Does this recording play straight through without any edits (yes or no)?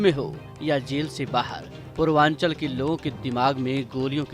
yes